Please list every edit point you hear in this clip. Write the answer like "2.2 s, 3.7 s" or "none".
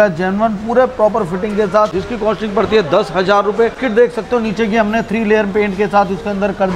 2.0 s, 3.8 s